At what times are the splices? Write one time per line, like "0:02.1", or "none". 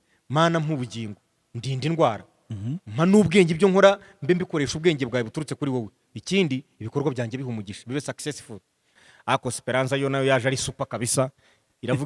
0:08.9